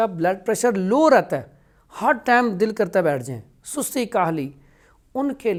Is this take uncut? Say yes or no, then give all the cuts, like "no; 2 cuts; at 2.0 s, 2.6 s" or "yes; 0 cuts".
yes; 0 cuts